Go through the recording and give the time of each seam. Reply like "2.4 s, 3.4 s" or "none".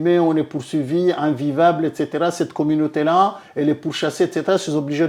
none